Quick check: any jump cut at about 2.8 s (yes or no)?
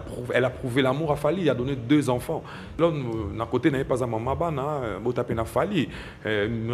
yes